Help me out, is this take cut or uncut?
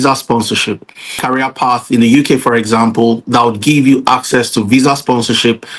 cut